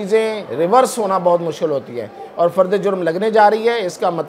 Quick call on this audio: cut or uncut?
uncut